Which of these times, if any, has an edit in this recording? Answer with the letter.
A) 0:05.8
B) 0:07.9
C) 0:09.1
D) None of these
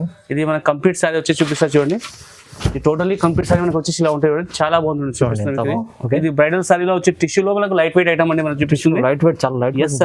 A